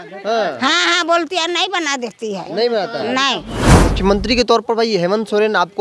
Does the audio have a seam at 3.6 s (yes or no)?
yes